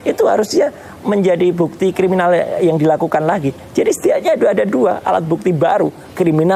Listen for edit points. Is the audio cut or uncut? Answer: uncut